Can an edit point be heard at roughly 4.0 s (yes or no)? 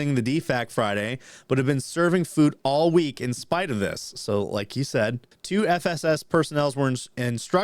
no